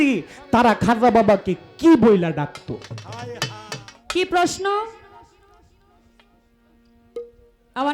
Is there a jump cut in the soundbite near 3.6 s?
yes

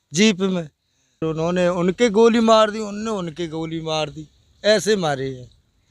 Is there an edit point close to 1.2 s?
yes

